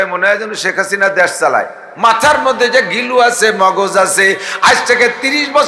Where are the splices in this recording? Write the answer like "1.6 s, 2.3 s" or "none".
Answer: 1.9 s